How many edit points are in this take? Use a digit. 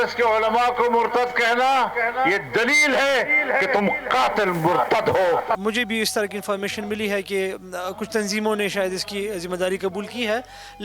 1